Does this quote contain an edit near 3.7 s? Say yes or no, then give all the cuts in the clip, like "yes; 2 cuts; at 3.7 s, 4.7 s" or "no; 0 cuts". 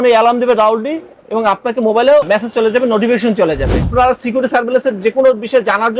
yes; 1 cut; at 3.7 s